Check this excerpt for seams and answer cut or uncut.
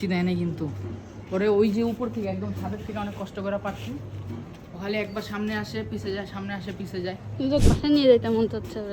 cut